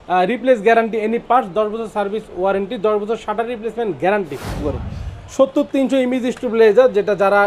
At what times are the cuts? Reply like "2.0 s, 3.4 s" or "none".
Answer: 4.6 s

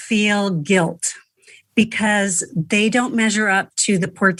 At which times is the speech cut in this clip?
none

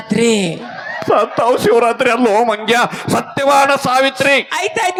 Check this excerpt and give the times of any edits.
none

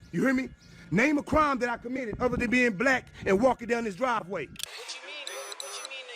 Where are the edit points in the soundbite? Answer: 4.6 s

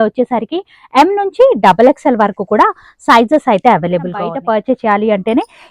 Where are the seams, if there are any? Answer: 4.3 s

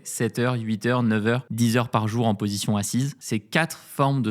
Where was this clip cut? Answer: 1.5 s, 3.2 s

